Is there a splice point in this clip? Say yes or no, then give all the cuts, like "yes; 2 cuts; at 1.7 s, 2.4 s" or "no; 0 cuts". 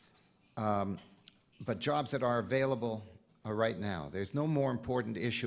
yes; 1 cut; at 4.1 s